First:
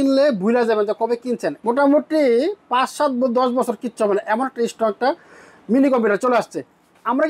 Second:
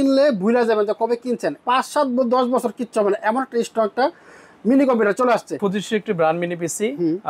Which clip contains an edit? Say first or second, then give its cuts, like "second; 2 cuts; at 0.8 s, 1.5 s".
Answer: second; 2 cuts; at 1.6 s, 5.6 s